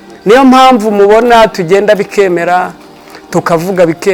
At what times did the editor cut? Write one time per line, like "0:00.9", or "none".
none